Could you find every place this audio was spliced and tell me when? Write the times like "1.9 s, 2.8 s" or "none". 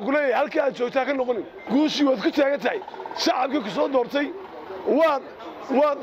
1.5 s